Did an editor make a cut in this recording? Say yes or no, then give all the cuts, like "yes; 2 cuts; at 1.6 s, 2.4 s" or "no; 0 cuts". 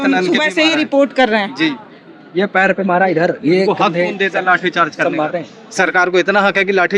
no; 0 cuts